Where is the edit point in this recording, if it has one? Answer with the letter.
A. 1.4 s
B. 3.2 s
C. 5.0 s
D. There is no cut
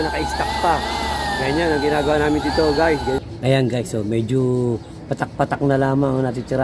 B